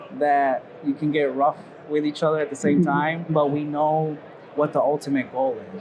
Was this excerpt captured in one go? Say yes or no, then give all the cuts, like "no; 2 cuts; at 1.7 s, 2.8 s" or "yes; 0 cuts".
no; 1 cut; at 3.3 s